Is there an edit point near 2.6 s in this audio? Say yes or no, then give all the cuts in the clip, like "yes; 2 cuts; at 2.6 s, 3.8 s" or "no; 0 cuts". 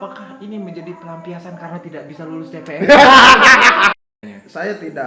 no; 1 cut; at 3.9 s